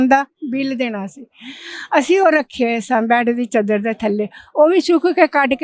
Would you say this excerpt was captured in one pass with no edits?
yes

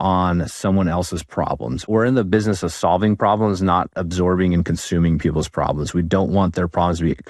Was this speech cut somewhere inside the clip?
no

